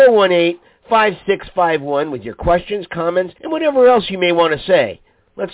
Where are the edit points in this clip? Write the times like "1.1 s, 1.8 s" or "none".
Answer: 3.4 s